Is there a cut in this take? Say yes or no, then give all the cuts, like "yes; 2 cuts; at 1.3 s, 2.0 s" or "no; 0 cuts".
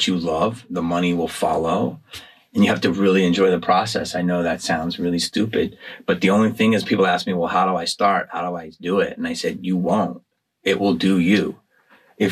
no; 0 cuts